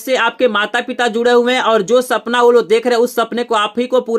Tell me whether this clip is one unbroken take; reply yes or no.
yes